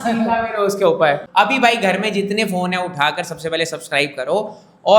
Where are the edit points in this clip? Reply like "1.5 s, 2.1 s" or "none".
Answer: 1.2 s